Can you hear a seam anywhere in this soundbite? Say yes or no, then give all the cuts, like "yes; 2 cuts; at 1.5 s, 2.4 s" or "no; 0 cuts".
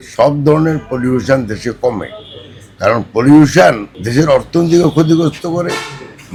no; 0 cuts